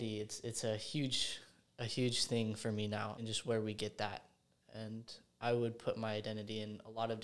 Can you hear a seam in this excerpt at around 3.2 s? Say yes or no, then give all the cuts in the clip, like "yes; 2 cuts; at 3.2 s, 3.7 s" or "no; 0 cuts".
yes; 1 cut; at 3.2 s